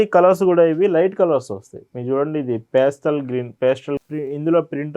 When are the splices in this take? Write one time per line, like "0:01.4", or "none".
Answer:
0:04.0

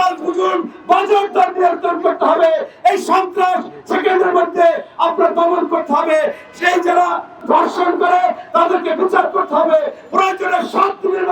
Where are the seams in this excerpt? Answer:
0:07.4

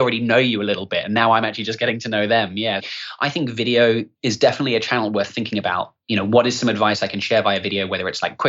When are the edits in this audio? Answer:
0:02.8
0:04.1
0:06.0

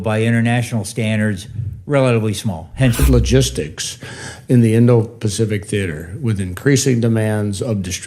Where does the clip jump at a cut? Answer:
0:03.0

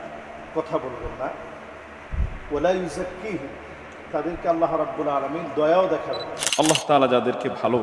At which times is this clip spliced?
0:06.3

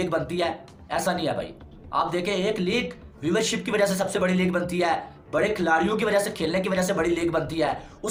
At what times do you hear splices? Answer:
none

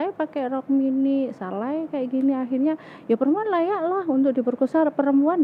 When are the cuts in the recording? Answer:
none

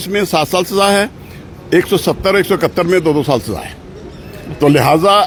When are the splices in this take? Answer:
none

